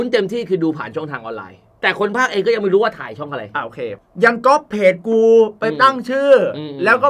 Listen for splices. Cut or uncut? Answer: cut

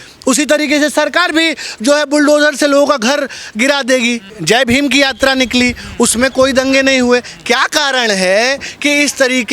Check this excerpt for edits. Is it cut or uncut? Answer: cut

